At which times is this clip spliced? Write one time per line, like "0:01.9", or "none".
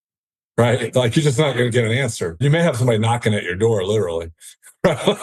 0:02.4